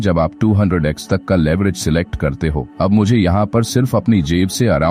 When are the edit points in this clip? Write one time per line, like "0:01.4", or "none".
none